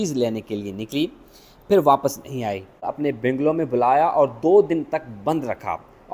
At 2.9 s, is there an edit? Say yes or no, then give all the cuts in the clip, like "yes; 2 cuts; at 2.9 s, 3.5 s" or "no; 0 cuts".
yes; 1 cut; at 2.9 s